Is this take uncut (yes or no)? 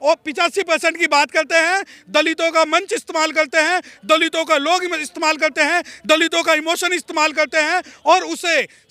yes